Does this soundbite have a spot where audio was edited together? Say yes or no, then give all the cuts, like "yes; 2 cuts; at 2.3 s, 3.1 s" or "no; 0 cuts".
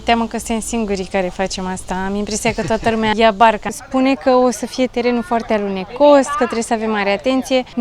yes; 2 cuts; at 3.1 s, 3.7 s